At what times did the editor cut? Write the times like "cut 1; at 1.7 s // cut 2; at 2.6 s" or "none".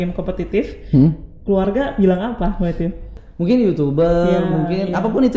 cut 1; at 3.1 s